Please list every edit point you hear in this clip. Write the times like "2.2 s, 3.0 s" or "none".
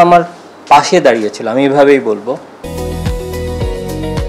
2.8 s